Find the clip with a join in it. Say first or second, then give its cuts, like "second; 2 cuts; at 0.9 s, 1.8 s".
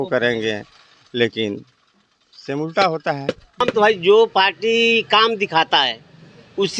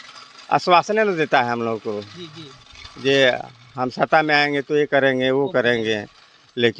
first; 1 cut; at 3.7 s